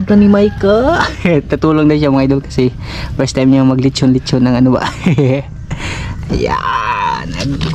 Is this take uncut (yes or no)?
yes